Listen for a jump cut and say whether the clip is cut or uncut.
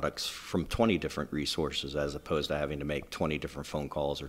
uncut